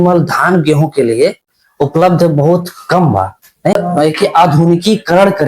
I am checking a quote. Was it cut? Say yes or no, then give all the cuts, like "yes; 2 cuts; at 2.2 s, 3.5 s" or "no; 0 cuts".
yes; 1 cut; at 3.8 s